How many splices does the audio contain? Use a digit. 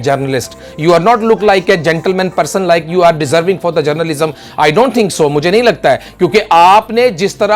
0